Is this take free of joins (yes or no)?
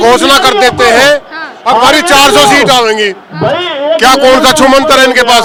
yes